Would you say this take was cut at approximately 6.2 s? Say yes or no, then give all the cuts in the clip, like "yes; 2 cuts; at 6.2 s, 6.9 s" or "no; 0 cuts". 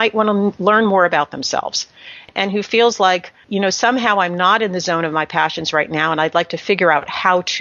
no; 2 cuts; at 2.3 s, 3.4 s